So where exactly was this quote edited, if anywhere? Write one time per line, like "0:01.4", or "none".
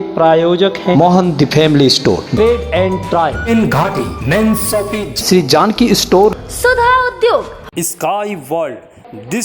0:00.9
0:03.5